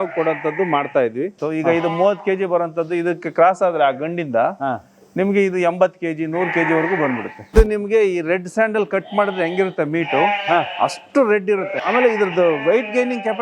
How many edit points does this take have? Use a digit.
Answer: 3